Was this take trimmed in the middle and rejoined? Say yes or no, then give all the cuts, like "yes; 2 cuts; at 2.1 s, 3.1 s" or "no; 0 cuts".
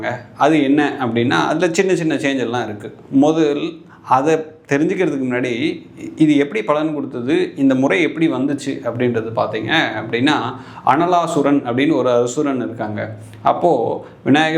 no; 0 cuts